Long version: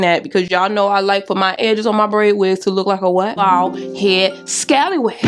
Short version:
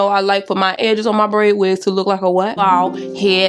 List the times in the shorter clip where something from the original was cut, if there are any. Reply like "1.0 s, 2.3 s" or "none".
none